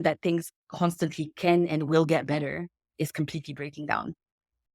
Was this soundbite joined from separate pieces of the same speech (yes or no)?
yes